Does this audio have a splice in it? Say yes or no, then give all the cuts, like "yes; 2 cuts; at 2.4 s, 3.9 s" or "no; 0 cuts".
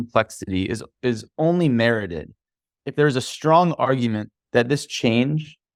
no; 0 cuts